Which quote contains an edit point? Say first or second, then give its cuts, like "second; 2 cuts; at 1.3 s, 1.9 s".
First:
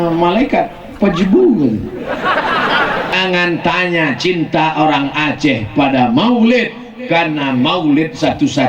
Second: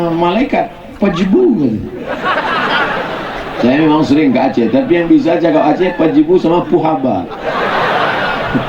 first; 1 cut; at 3.2 s